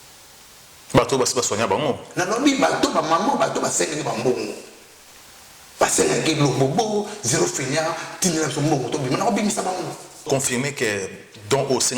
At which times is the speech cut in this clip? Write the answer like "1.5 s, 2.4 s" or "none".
10.3 s